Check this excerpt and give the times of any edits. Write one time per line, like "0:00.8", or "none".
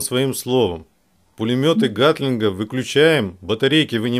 none